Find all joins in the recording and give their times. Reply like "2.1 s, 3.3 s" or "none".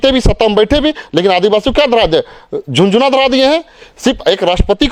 none